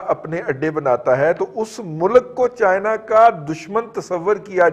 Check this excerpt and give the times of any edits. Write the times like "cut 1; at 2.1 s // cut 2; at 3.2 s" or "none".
none